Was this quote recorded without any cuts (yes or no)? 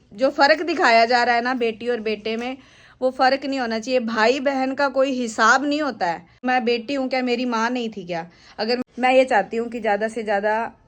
no